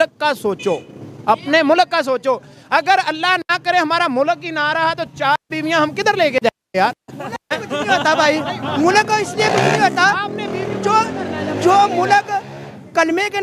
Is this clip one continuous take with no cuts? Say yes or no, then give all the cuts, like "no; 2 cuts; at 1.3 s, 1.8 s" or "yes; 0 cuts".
yes; 0 cuts